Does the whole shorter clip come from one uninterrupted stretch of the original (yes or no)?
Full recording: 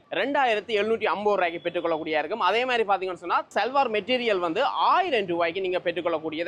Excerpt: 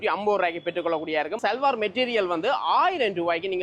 no